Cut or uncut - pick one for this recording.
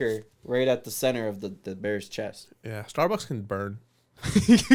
uncut